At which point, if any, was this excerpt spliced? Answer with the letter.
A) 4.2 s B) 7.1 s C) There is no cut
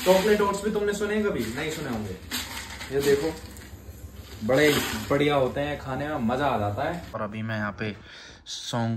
B